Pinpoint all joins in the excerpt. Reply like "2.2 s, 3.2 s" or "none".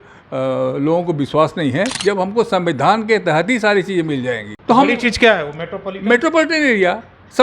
1.9 s, 4.5 s